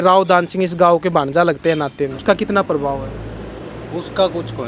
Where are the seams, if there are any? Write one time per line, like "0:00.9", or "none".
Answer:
0:02.2